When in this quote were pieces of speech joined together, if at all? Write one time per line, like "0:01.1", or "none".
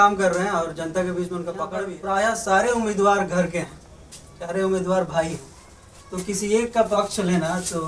0:01.8